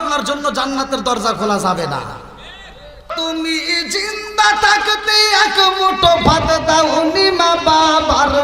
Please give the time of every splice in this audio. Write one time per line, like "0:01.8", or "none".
0:03.1